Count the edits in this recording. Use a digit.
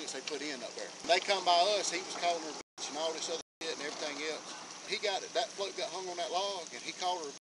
2